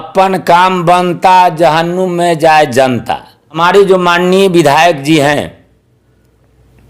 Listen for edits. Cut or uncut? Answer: cut